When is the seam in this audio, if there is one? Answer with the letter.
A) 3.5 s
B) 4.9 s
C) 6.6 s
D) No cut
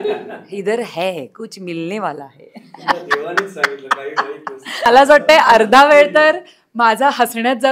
B